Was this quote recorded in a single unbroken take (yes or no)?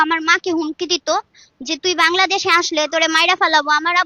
yes